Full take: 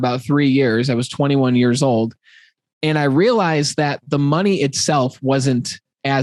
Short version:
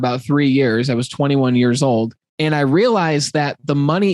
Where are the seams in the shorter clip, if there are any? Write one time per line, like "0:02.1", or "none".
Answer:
0:02.2